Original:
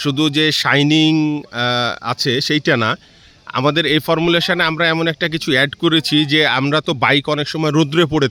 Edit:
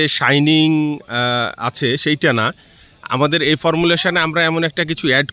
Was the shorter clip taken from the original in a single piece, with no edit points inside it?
yes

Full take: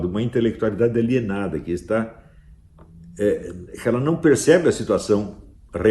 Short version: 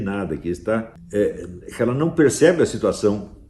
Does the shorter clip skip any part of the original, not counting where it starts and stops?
yes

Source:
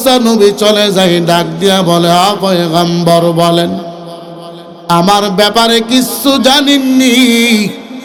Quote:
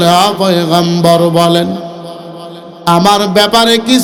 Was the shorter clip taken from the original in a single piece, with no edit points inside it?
yes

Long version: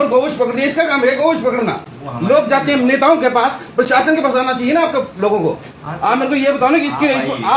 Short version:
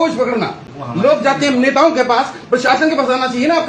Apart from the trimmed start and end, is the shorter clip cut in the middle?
no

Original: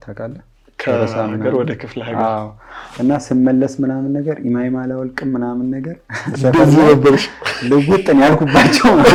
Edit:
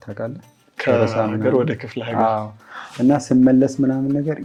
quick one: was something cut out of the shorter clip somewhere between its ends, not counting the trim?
no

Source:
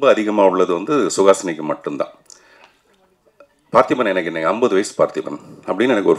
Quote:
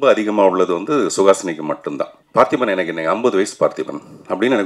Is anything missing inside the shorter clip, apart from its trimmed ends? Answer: yes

